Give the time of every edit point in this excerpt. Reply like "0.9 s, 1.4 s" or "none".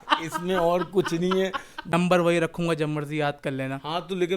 1.9 s

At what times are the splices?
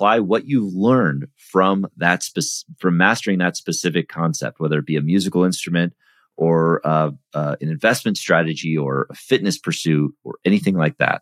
none

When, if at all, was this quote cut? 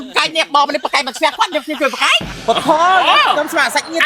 none

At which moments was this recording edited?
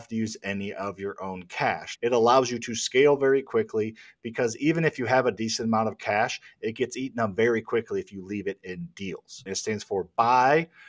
1.9 s, 9.4 s

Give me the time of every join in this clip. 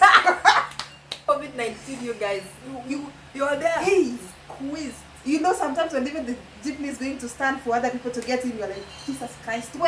1.2 s

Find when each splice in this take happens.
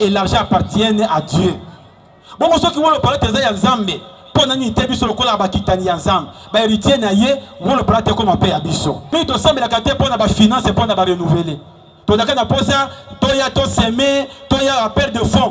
9.1 s

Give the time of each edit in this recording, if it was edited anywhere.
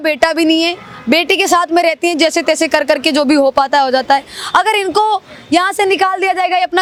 none

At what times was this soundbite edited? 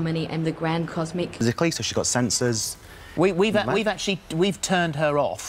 1.3 s

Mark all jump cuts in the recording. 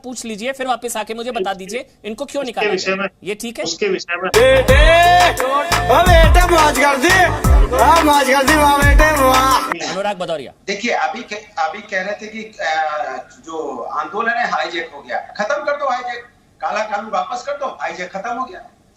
9.7 s

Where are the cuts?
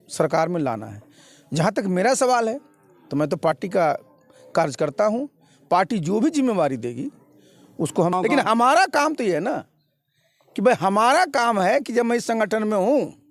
8.1 s

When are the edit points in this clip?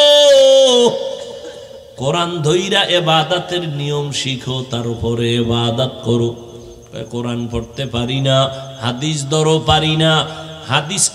none

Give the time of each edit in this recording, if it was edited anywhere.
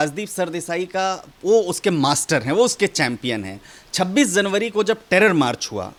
none

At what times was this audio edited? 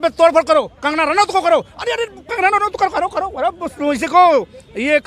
none

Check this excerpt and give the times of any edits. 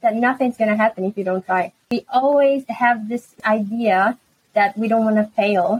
1.8 s, 3.4 s

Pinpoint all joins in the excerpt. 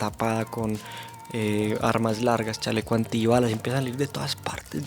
none

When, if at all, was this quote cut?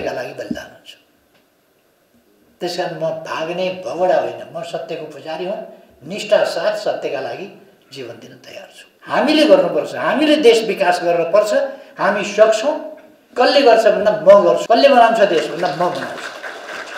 8.9 s, 14.6 s

